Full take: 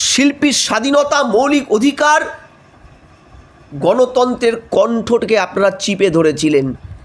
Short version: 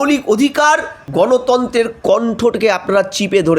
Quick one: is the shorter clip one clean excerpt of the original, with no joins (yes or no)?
no